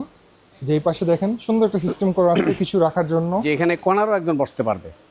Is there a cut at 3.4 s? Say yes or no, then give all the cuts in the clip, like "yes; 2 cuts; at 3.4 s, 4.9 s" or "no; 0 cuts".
yes; 1 cut; at 3.4 s